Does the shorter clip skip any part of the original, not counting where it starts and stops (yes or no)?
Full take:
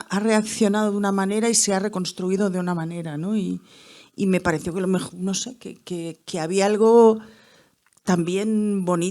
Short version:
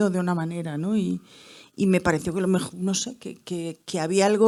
no